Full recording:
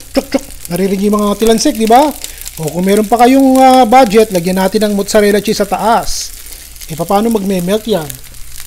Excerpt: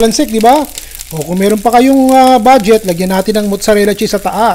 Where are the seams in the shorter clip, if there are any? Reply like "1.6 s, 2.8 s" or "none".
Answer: none